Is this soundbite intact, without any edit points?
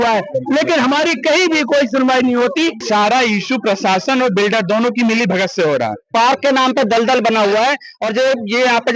no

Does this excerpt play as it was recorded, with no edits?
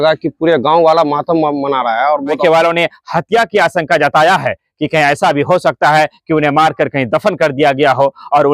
no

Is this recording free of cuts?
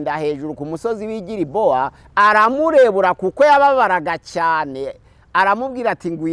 no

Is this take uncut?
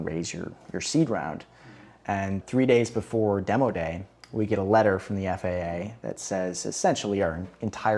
no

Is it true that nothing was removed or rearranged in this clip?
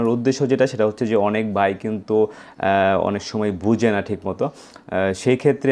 yes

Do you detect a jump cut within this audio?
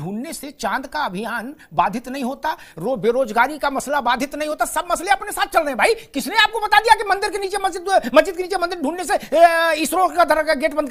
no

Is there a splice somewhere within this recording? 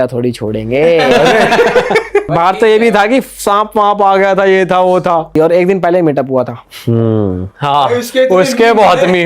yes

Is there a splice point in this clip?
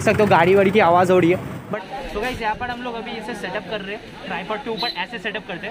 yes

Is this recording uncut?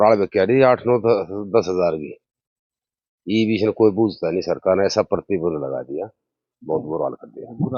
yes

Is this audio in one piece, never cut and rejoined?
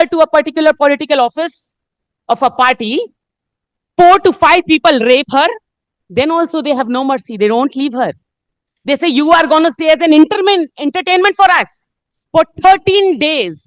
yes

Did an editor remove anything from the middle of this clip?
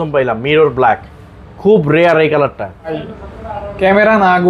yes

